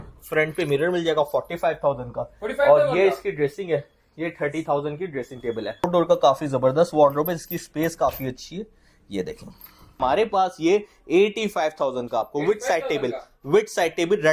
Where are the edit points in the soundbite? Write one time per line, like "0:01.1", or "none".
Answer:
0:05.8
0:10.0

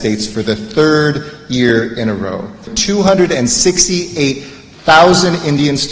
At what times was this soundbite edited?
0:02.7

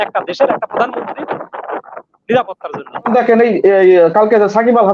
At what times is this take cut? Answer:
0:03.1

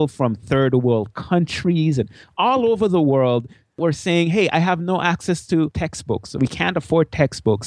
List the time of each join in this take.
0:03.8
0:05.8

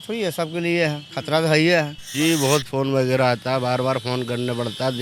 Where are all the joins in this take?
0:02.0

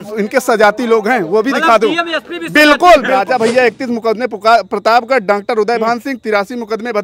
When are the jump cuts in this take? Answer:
0:03.1

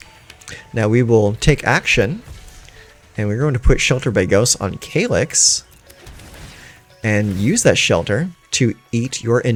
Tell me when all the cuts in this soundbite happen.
none

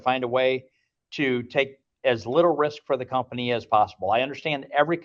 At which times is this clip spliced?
none

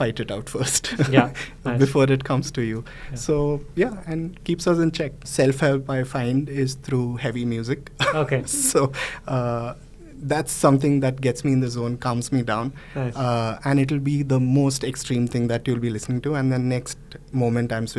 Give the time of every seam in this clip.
0:05.2

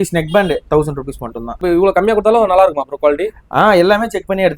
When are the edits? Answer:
0:01.6

